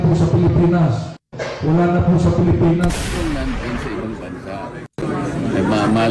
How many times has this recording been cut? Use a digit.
1